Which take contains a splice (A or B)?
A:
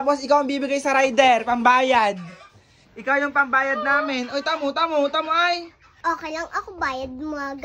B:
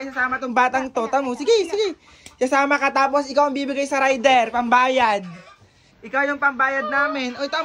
A